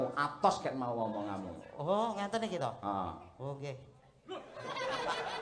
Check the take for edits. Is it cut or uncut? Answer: uncut